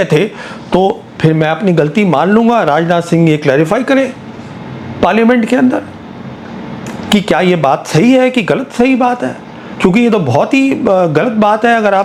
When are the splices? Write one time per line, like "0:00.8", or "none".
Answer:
none

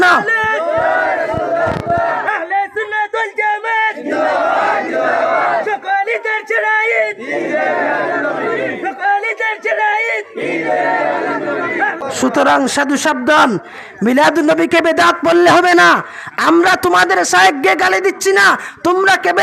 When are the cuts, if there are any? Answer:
0:12.0

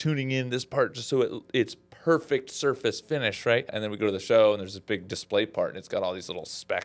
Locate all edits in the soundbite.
0:03.8

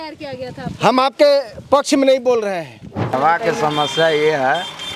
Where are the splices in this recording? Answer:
0:03.1

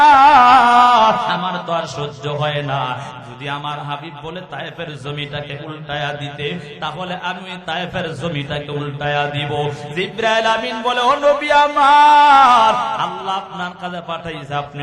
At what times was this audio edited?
0:01.5

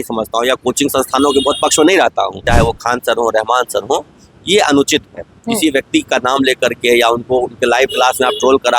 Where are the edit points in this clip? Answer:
0:02.4

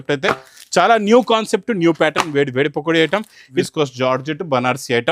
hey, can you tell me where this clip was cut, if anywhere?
0:03.6

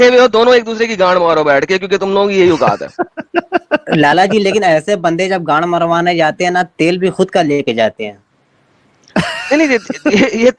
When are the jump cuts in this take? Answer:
none

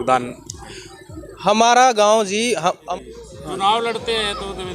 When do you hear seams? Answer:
0:02.8

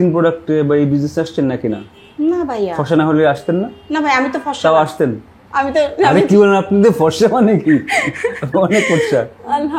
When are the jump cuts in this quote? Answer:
none

